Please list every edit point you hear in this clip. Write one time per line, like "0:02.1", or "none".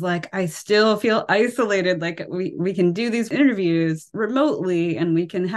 0:03.3
0:04.1